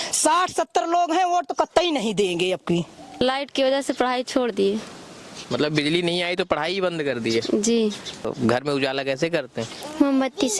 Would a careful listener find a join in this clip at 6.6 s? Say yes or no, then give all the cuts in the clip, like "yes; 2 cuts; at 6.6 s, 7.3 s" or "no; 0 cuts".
no; 2 cuts; at 3.1 s, 8.3 s